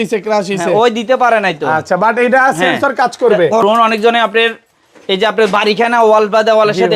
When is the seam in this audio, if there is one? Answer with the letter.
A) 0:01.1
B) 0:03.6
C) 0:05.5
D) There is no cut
B